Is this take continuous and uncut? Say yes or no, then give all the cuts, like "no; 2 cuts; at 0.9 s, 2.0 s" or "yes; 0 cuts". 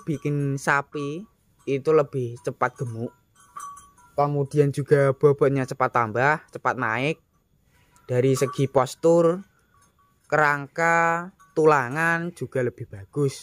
yes; 0 cuts